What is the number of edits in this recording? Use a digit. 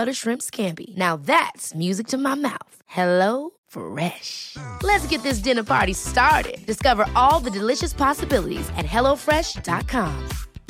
0